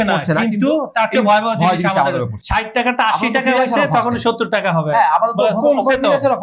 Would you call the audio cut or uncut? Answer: cut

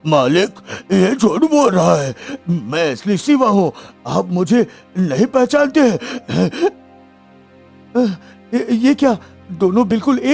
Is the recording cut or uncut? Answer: uncut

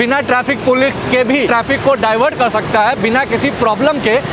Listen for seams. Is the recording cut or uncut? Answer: cut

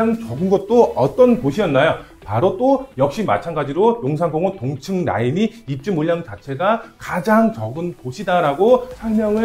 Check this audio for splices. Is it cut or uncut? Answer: uncut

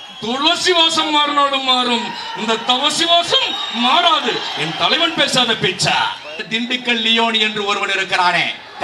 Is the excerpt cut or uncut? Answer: cut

